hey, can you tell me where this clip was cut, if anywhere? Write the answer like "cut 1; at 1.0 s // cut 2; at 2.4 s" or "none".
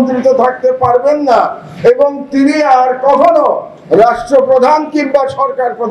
none